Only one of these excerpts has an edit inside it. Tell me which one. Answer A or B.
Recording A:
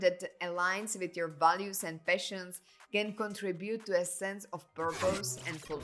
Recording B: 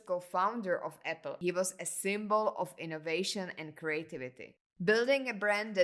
B